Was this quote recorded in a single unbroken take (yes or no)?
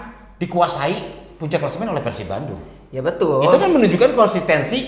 yes